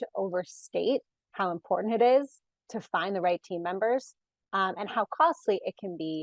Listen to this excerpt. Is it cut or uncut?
uncut